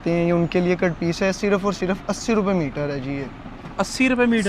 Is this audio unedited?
yes; 0 cuts

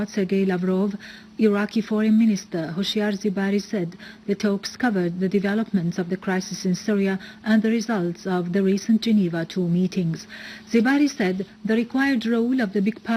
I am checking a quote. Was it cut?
no; 0 cuts

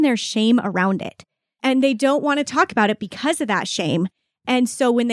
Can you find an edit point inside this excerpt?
yes; 1 cut; at 1.5 s

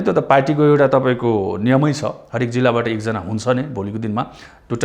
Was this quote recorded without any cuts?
yes; 0 cuts

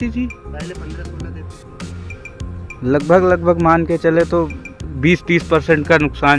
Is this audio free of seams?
yes; 0 cuts

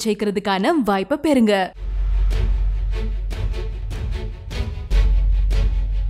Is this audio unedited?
yes; 0 cuts

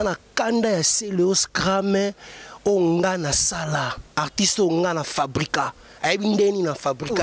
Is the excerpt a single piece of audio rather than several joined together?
yes; 0 cuts

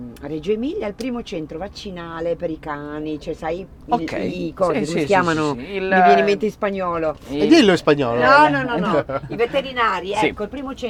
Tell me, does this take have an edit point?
no; 0 cuts

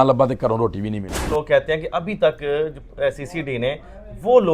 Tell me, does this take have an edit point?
yes; 1 cut; at 1.3 s

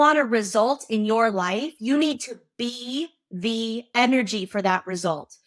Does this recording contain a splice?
no; 0 cuts

